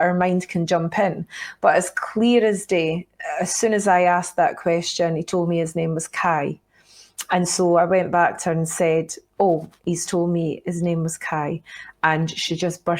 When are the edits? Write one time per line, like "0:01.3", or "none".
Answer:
none